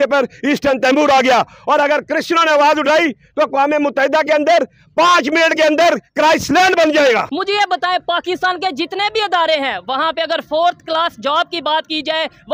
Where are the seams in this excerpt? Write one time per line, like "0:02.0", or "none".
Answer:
0:07.3